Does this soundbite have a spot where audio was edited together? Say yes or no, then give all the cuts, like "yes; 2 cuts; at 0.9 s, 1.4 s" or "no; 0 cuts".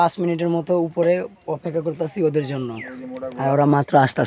no; 0 cuts